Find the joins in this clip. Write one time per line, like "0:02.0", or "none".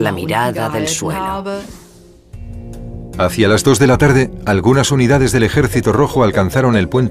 0:02.1